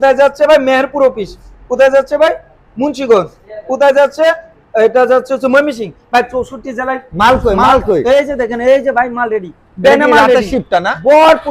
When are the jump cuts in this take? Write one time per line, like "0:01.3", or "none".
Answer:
none